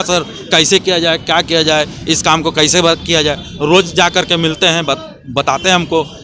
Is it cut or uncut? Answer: uncut